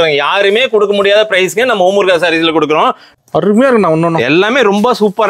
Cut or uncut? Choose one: cut